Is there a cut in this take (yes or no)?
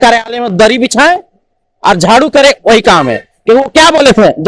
no